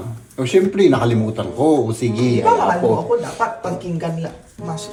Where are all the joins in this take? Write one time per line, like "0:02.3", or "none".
none